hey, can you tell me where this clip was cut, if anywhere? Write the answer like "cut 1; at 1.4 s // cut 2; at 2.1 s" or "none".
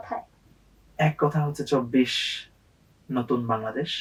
none